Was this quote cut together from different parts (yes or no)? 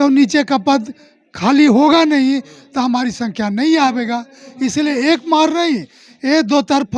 no